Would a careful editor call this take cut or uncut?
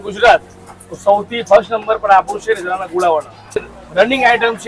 cut